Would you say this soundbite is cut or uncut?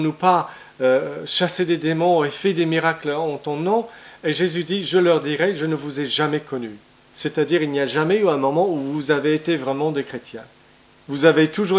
uncut